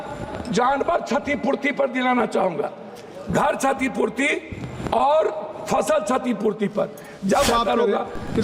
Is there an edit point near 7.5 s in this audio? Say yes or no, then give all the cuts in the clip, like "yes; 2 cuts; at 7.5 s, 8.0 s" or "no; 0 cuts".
yes; 1 cut; at 7.5 s